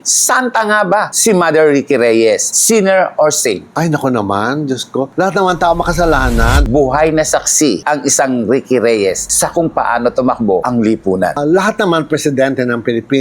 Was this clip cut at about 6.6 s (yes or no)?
yes